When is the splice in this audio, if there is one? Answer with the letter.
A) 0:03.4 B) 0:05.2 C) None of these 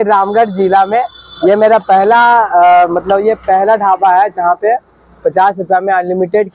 C